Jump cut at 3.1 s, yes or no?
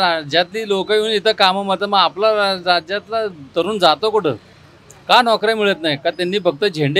no